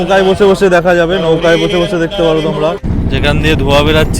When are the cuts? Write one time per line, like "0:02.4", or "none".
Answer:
0:02.8

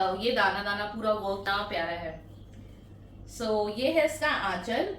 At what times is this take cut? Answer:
0:01.4

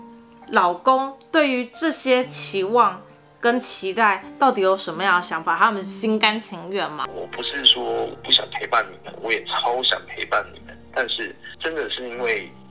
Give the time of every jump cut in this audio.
0:07.1

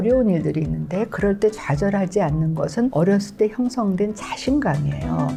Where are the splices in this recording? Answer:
none

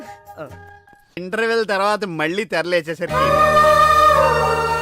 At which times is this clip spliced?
0:01.2

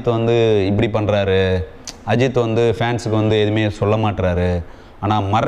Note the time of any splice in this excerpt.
none

